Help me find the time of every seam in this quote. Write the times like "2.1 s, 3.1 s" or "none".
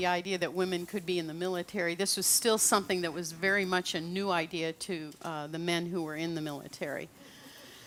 none